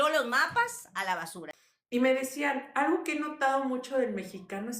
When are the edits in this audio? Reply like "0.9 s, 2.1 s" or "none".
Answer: 1.6 s